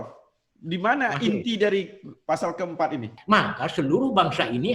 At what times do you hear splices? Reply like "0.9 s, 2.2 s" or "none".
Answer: 3.2 s